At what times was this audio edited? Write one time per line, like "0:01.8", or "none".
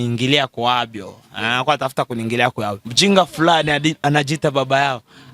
0:02.8